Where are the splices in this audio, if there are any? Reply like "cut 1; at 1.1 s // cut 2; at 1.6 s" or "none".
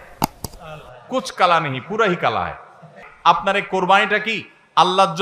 cut 1; at 3.1 s